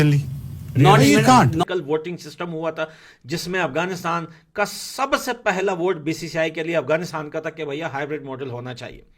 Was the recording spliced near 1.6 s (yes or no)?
yes